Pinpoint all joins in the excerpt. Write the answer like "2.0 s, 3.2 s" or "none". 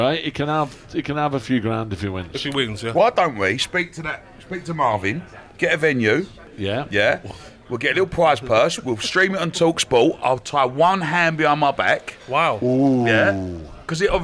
none